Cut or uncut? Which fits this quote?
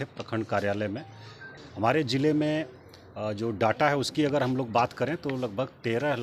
cut